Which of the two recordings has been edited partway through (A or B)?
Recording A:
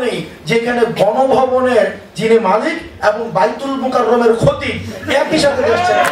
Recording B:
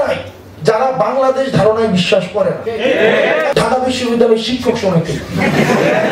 B